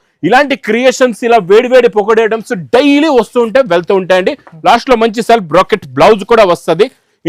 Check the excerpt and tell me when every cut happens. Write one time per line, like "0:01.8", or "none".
none